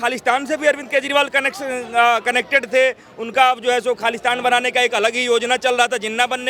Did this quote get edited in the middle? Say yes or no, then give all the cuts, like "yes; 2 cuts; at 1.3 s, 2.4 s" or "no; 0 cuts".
no; 0 cuts